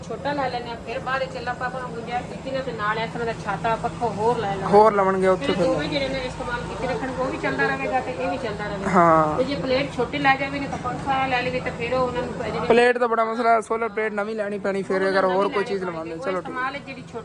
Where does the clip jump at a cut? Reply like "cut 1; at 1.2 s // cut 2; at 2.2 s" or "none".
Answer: none

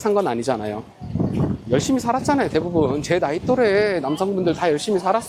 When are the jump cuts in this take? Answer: none

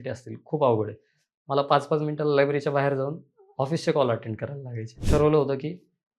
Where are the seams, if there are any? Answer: cut 1; at 5.0 s

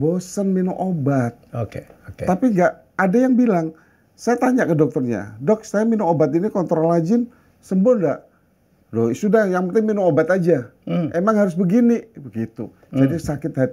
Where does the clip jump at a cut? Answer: none

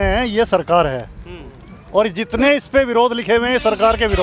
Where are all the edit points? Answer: none

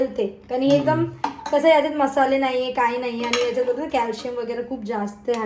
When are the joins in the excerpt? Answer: none

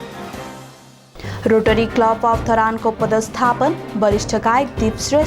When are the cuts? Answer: none

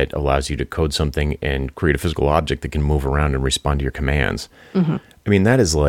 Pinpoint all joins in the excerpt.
cut 1; at 1.7 s

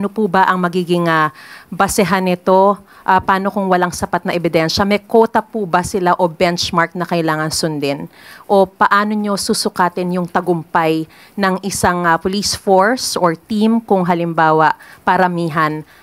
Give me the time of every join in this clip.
none

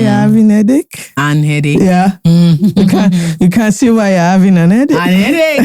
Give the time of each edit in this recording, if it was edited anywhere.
none

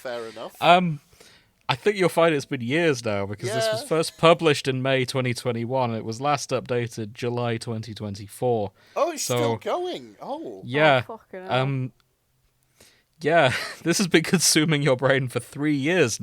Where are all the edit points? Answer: cut 1; at 12.0 s

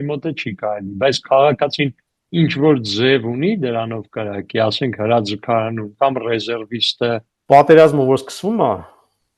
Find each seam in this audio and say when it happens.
cut 1; at 7.3 s

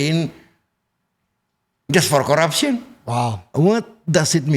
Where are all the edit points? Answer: cut 1; at 3.5 s

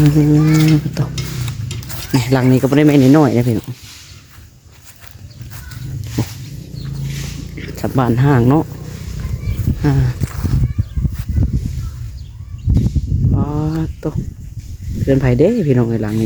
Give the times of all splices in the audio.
none

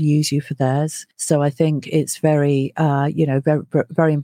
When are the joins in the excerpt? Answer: cut 1; at 1.1 s

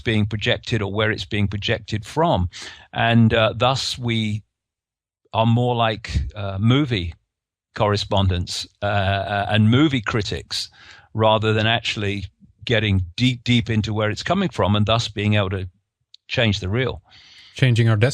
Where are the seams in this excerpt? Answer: cut 1; at 9.3 s

